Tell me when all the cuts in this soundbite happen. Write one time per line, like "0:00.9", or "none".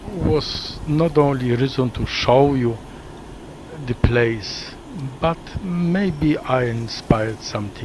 0:02.5